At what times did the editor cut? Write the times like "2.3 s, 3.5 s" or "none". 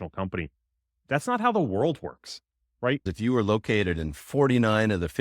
3.1 s